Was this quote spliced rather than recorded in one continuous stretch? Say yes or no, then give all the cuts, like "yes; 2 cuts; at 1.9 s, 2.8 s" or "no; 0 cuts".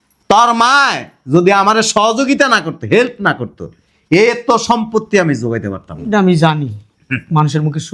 no; 0 cuts